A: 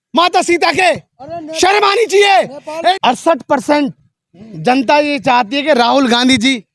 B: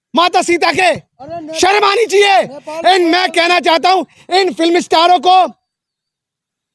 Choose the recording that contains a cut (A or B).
A